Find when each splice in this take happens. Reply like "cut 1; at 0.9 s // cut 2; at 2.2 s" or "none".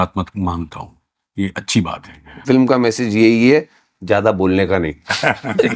cut 1; at 2.4 s